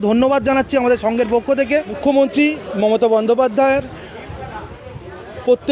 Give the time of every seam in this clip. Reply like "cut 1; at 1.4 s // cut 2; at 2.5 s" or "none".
cut 1; at 2.0 s